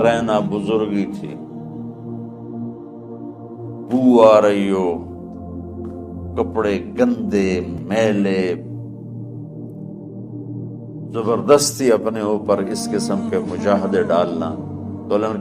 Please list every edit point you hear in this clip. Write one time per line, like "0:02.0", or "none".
0:01.2
0:03.9
0:05.0
0:06.4
0:08.7
0:10.7